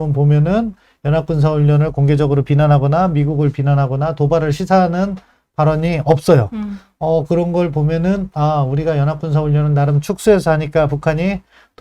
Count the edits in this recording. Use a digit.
0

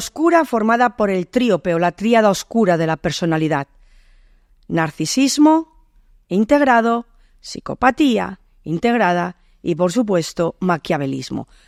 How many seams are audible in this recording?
0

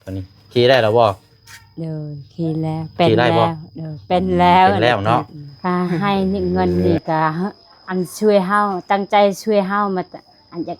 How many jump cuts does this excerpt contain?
1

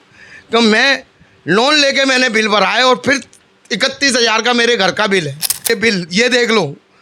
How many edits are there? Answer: 1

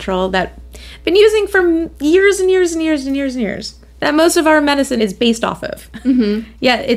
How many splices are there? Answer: 1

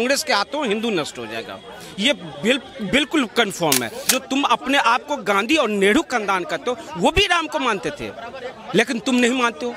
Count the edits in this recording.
1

